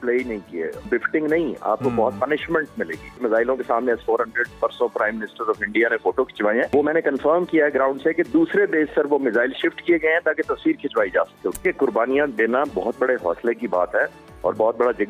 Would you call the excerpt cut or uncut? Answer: cut